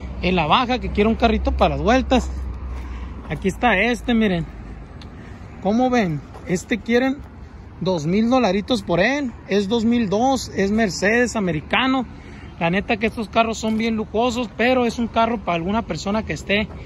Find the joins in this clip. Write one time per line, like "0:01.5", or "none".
none